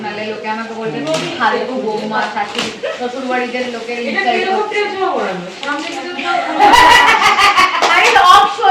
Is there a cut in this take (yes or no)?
no